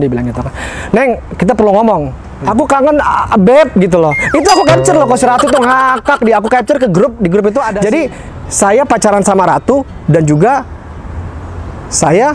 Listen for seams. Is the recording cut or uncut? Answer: cut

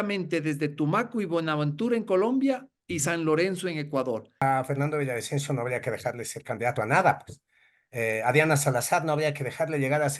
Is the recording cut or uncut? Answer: cut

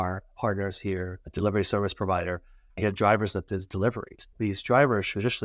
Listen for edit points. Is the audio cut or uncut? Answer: cut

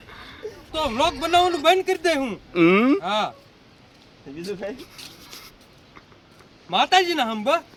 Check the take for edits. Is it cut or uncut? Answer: uncut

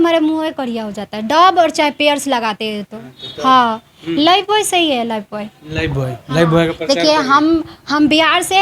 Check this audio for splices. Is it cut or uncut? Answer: uncut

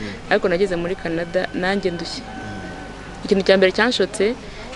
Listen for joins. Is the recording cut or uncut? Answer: uncut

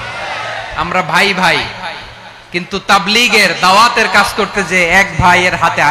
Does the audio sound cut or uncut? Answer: uncut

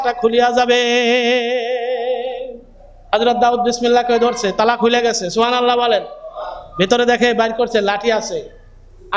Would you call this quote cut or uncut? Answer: cut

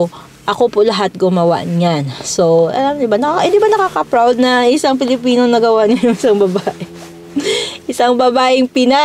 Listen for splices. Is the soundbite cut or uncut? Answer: uncut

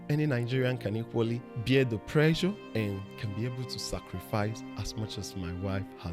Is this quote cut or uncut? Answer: cut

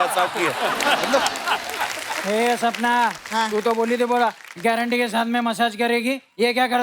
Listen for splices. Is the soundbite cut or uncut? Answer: cut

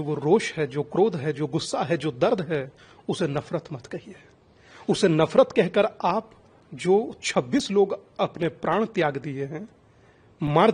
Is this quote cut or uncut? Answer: uncut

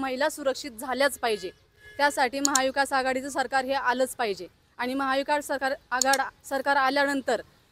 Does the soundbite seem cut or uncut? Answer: uncut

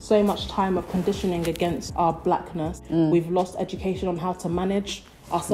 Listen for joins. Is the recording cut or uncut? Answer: cut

